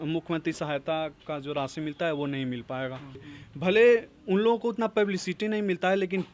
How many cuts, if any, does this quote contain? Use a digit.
1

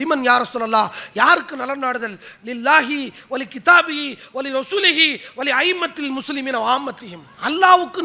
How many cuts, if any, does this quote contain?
0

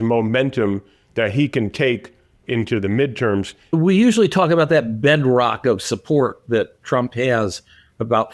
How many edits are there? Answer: 2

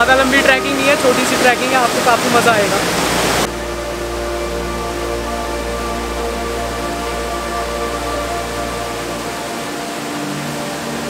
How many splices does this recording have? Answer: 0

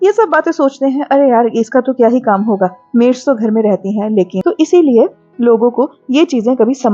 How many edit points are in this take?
1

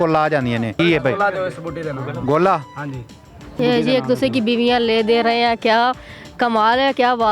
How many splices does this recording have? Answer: 2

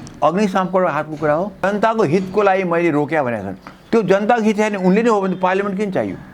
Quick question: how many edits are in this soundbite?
1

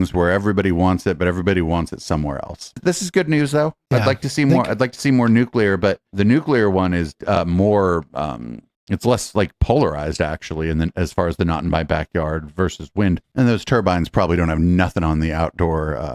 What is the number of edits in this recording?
2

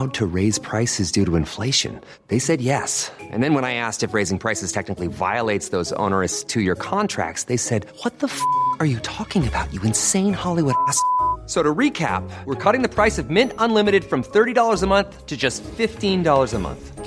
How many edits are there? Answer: 0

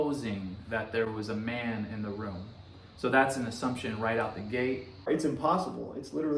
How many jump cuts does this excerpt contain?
1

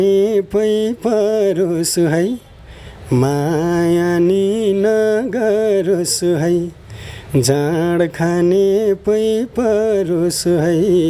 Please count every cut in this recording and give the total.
0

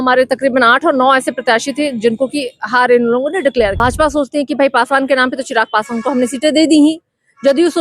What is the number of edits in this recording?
1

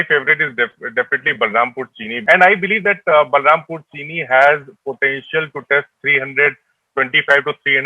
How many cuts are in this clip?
1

